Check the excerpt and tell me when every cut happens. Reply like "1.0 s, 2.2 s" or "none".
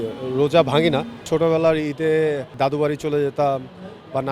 1.2 s, 2.5 s